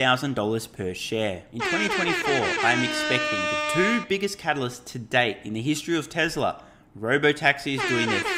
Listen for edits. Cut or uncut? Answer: cut